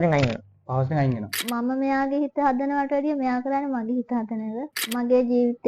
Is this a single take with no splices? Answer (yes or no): no